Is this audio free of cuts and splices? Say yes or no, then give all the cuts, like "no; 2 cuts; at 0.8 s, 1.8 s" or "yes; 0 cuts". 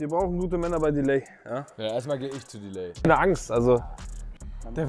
no; 1 cut; at 3.1 s